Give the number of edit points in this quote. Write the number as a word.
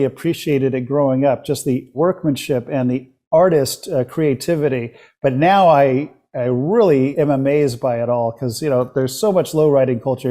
two